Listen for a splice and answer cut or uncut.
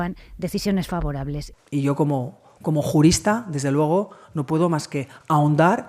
cut